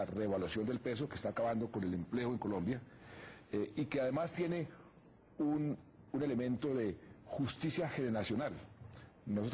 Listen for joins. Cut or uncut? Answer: cut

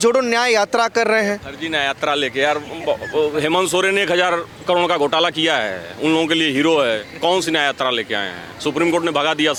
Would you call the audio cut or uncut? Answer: uncut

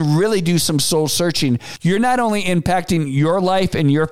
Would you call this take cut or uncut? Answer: cut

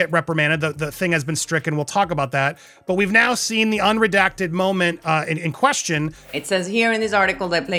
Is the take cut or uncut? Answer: uncut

